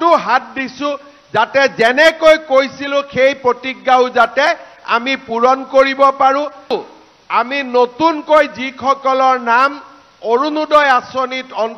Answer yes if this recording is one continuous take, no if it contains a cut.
no